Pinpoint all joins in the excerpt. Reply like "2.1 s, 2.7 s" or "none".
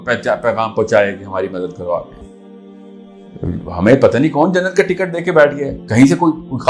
2.2 s